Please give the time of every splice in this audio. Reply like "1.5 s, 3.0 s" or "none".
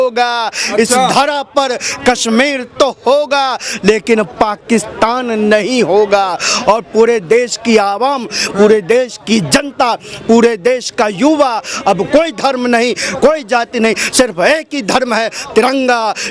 none

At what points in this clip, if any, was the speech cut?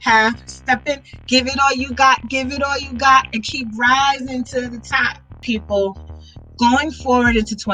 5.4 s

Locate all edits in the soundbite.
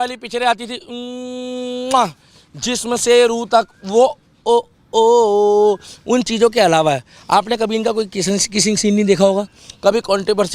none

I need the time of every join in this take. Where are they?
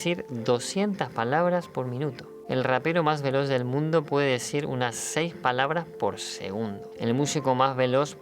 6.8 s

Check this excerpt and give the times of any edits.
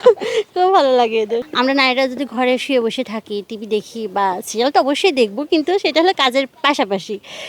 1.5 s

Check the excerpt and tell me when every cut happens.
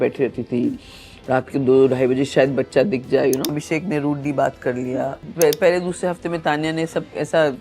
3.5 s, 5.2 s

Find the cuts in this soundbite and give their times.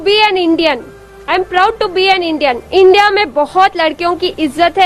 none

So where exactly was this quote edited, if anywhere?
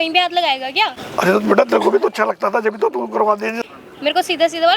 1.0 s, 3.6 s

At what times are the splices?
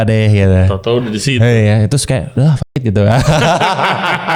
none

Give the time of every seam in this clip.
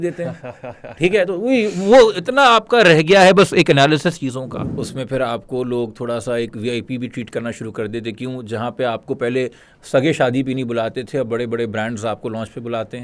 4.6 s

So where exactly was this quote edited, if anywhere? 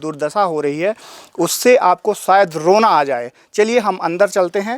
none

